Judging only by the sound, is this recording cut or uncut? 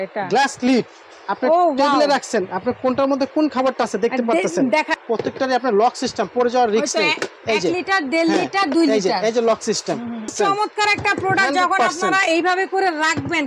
cut